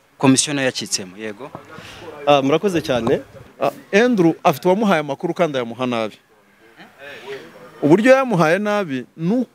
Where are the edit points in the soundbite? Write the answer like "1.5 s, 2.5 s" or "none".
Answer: 3.3 s